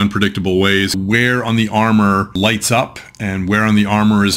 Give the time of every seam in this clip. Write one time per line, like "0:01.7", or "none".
0:01.0
0:02.3